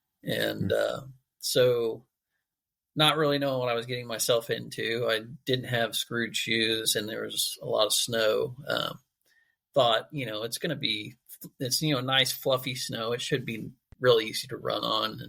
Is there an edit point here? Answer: no; 0 cuts

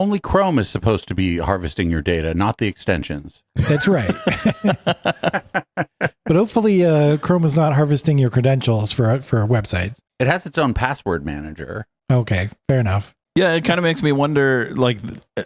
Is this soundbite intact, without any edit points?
yes; 0 cuts

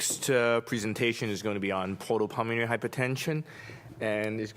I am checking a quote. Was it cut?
yes; 1 cut; at 2.2 s

